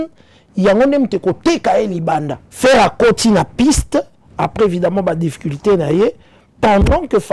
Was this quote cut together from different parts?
yes; 1 cut; at 2.4 s

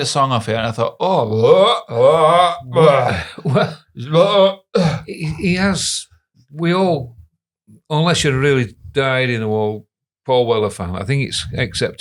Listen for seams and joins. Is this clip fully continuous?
yes; 0 cuts

